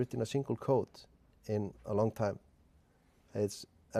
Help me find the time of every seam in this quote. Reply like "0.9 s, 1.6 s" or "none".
1.2 s